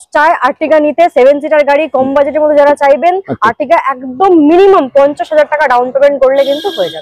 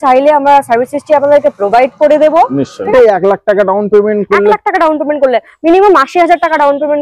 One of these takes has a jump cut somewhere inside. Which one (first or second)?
second